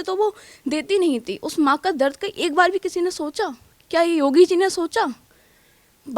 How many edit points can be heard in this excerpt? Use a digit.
0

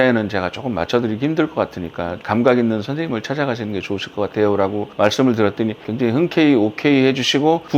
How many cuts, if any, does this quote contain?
0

